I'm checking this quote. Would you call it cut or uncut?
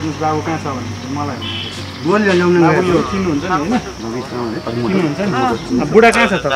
uncut